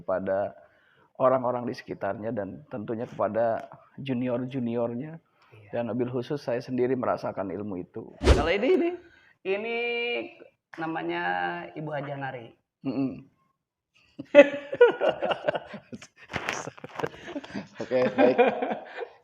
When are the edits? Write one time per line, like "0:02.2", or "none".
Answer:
0:08.4